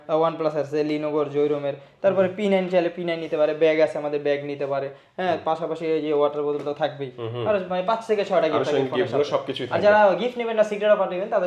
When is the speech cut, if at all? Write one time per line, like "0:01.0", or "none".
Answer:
none